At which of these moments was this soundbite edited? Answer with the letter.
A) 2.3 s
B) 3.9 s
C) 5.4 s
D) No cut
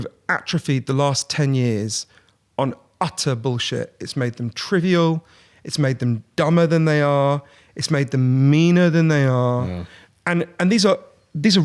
D